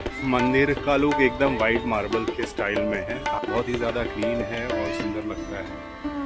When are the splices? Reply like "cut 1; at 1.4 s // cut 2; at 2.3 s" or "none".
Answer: none